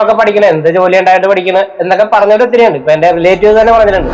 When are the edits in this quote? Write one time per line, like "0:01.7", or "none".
0:01.7